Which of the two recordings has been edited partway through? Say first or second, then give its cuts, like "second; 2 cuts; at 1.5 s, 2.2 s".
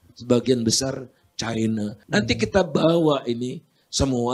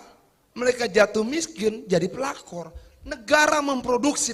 first; 1 cut; at 2.0 s